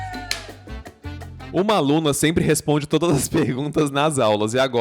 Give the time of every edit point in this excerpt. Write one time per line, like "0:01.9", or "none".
0:01.4